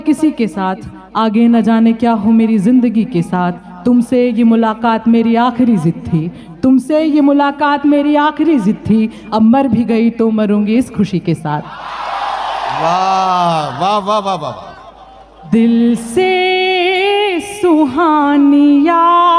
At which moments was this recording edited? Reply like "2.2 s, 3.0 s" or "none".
15.5 s